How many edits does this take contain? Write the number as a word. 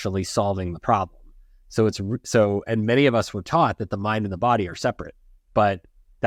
zero